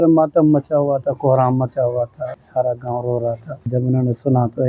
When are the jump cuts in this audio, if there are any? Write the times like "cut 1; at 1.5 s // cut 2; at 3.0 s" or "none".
cut 1; at 2.4 s // cut 2; at 3.6 s